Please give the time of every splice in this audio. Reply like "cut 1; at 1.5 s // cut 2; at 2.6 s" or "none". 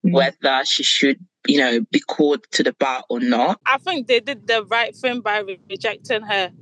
cut 1; at 3.6 s

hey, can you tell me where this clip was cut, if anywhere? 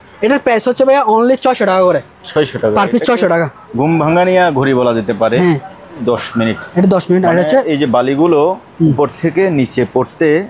cut 1; at 6.0 s

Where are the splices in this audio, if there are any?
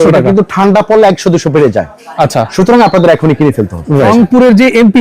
cut 1; at 4.1 s

